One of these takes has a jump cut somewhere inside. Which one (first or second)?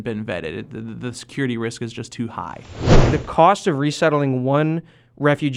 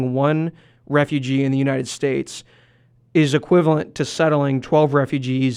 first